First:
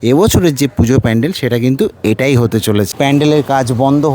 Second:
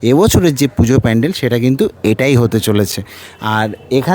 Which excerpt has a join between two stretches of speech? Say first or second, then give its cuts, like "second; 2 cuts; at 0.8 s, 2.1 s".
first; 1 cut; at 2.9 s